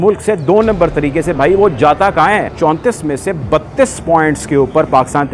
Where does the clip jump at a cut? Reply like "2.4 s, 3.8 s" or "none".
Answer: 2.5 s